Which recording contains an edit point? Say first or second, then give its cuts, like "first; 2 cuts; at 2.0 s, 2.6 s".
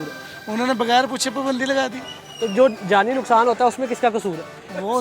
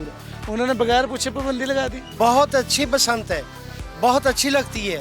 second; 1 cut; at 2.0 s